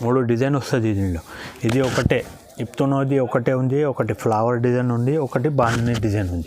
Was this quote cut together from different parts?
no; 0 cuts

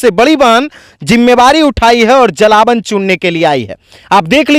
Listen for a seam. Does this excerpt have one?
no; 0 cuts

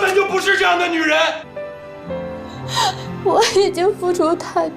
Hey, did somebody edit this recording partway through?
yes; 1 cut; at 1.5 s

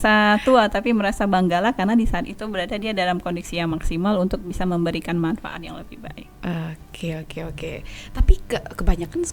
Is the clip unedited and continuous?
yes; 0 cuts

